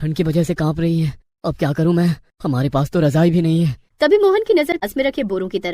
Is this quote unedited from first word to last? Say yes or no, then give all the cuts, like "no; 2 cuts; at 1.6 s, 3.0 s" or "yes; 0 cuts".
no; 1 cut; at 4.8 s